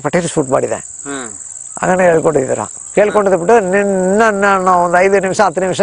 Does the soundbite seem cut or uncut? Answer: uncut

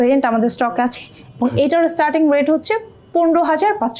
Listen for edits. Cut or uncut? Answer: uncut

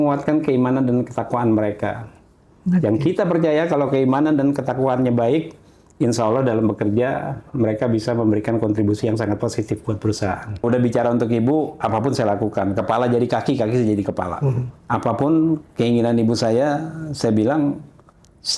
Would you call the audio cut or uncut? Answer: cut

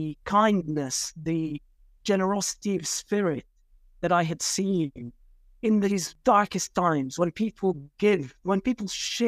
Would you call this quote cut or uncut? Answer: cut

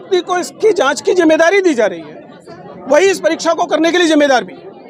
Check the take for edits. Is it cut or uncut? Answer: uncut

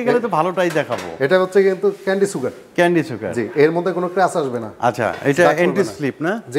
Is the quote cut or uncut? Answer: uncut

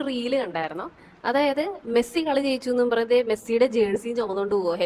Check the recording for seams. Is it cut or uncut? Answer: uncut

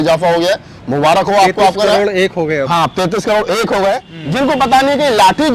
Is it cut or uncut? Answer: cut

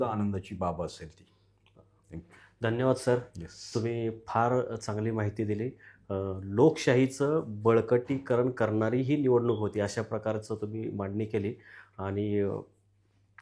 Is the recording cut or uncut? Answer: uncut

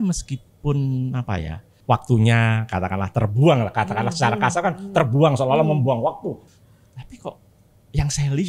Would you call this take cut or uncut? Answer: cut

